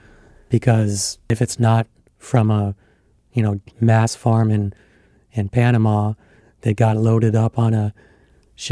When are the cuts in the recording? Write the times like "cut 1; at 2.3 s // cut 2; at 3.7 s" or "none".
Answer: cut 1; at 1.3 s